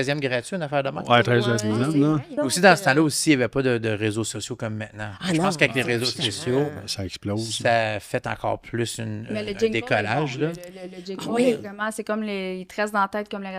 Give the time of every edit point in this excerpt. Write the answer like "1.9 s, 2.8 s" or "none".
2.3 s